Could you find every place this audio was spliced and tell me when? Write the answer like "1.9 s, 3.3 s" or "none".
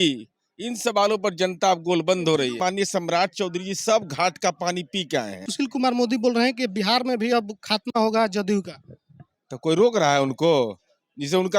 2.6 s, 5.5 s